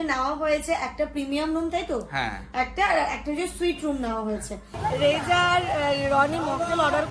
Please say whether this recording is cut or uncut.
cut